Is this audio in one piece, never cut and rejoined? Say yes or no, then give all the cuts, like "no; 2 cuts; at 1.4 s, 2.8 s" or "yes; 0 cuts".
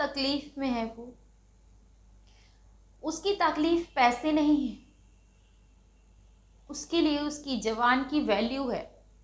yes; 0 cuts